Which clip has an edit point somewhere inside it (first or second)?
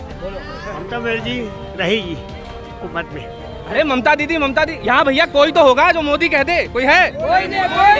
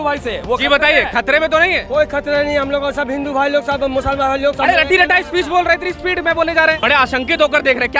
second